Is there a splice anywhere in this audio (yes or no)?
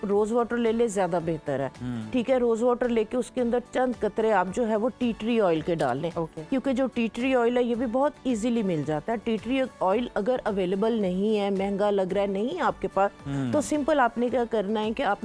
no